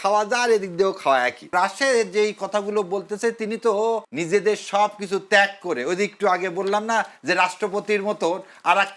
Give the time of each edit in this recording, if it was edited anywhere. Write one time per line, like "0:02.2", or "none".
0:01.5
0:04.1